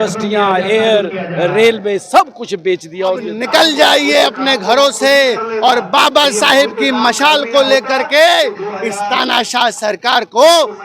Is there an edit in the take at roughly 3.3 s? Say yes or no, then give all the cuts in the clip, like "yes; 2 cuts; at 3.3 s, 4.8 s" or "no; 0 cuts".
yes; 1 cut; at 3.3 s